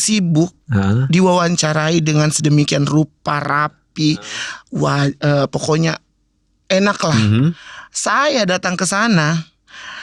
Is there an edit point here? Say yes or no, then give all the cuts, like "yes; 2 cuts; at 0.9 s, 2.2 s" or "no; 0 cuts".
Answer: no; 0 cuts